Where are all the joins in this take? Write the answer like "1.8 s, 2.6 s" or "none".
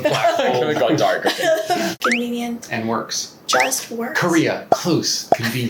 1.9 s